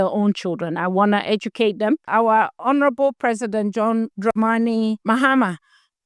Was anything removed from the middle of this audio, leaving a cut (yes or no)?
yes